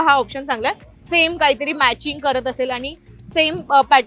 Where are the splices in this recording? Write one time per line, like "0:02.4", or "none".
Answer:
none